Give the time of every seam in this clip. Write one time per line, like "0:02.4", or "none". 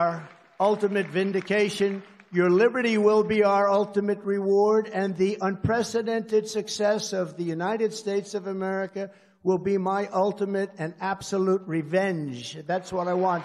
none